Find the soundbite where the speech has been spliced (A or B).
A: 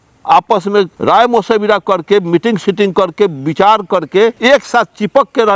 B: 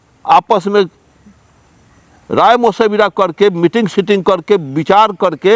A